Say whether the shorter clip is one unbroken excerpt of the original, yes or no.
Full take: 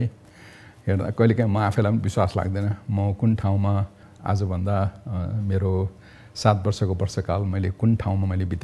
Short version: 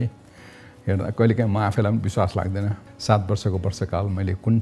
no